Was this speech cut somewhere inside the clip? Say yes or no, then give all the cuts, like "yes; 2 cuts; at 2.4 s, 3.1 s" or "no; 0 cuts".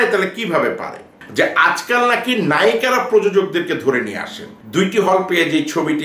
yes; 2 cuts; at 1.2 s, 4.5 s